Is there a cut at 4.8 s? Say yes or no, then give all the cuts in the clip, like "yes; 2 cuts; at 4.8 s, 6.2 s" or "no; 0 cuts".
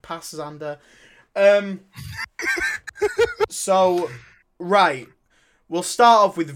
no; 1 cut; at 3.6 s